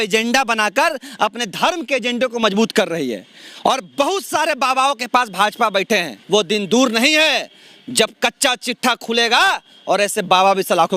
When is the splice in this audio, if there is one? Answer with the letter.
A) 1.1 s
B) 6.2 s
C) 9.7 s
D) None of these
B